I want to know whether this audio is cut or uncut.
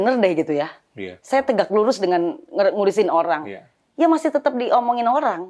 uncut